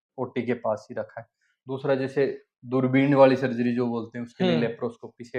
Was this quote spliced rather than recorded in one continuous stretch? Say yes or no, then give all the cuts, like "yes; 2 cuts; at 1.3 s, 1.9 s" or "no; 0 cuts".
no; 0 cuts